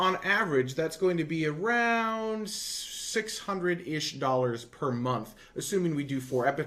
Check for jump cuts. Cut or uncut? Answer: uncut